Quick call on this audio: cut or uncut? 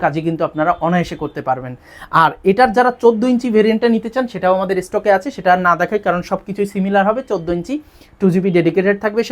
uncut